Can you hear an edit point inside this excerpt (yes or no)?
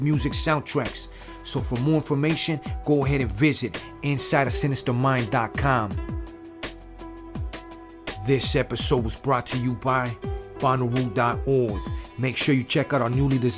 yes